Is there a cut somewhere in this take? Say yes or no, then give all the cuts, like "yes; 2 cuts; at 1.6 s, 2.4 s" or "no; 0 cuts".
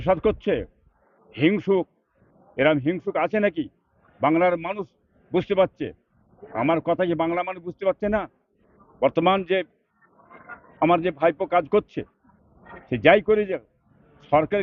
no; 0 cuts